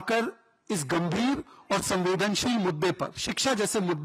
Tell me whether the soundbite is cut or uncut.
uncut